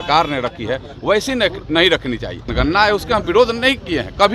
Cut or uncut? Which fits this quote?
cut